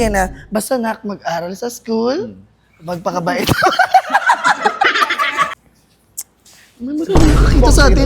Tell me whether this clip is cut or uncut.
cut